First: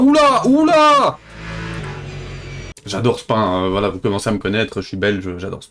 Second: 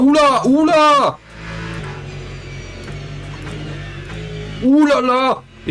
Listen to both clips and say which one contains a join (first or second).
first